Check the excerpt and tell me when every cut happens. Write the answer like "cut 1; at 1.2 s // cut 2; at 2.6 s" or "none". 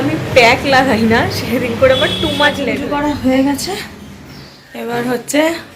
cut 1; at 2.7 s